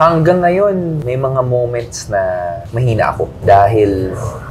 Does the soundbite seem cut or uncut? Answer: uncut